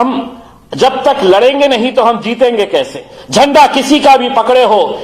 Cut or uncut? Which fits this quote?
cut